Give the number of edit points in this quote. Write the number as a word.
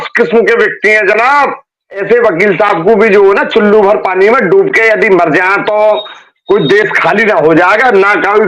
one